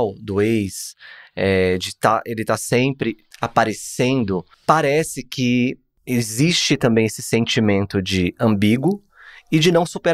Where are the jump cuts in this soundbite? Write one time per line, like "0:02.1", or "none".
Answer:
0:03.3
0:04.5
0:05.9